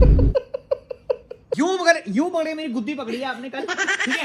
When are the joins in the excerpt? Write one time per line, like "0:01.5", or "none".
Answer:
0:01.5